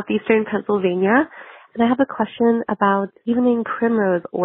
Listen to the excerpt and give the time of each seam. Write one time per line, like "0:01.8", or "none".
0:03.1